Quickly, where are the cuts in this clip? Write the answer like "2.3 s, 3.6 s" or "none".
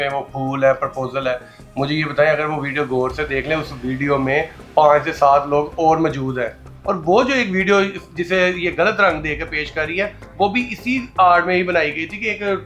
6.7 s